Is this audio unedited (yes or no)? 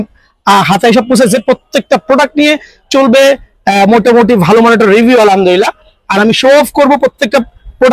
yes